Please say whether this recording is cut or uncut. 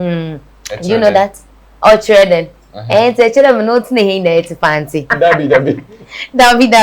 cut